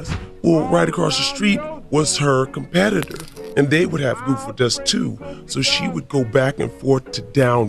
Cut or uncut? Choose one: uncut